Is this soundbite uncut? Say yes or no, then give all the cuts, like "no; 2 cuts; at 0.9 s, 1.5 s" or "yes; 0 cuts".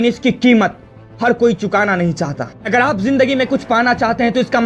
no; 1 cut; at 2.4 s